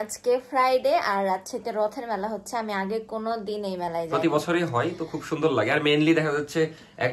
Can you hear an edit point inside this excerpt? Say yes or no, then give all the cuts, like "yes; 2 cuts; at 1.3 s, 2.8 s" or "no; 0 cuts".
no; 0 cuts